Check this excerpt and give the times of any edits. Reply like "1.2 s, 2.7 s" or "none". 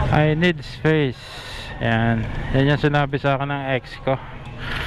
none

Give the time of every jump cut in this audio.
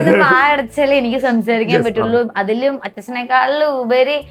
none

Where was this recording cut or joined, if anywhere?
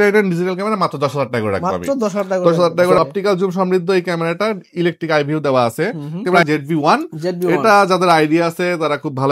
2.9 s, 6.4 s

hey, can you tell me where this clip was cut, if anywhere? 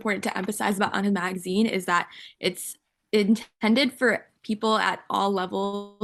none

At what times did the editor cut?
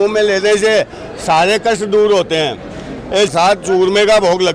3.3 s

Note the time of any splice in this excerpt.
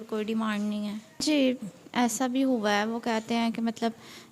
1.2 s

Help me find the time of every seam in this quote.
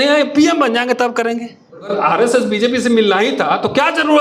1.9 s

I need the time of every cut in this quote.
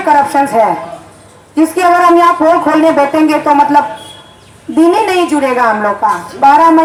none

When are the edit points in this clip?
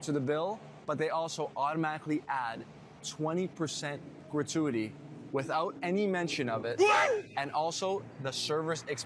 none

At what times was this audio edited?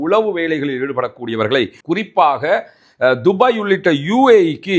1.8 s

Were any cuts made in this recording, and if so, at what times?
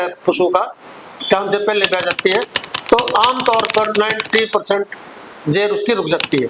none

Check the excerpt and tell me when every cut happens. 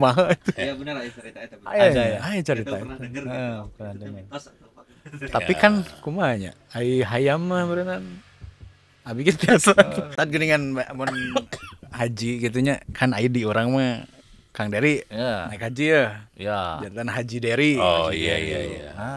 10.0 s

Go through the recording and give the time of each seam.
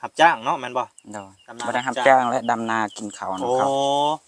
none

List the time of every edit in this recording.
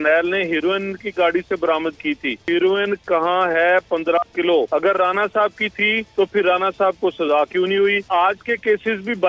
2.5 s, 4.7 s, 6.0 s, 8.1 s

